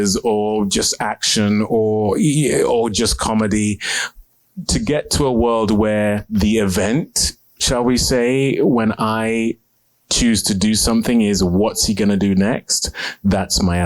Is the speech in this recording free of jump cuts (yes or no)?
no